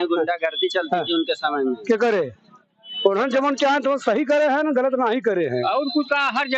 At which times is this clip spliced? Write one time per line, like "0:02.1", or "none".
0:05.6